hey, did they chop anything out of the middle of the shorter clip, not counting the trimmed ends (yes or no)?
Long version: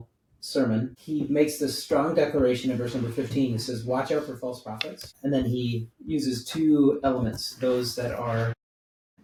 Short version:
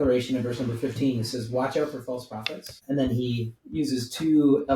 no